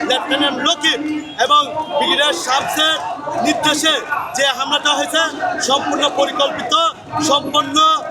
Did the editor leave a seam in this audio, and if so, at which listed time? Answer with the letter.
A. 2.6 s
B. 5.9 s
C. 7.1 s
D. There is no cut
D